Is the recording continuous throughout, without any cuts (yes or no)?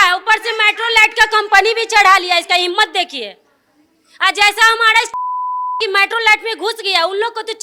yes